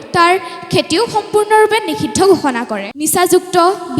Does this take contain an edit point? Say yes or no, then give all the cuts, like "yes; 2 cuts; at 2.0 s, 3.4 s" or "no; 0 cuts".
yes; 1 cut; at 2.8 s